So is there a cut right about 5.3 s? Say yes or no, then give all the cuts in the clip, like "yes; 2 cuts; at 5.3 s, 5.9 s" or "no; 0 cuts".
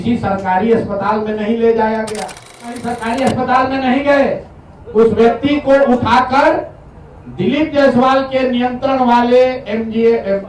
no; 1 cut; at 2.9 s